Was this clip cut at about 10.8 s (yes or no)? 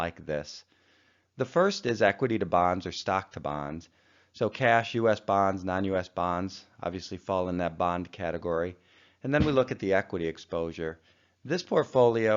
yes